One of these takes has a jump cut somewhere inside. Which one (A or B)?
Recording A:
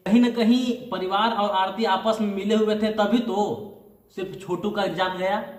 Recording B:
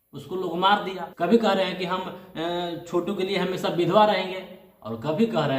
B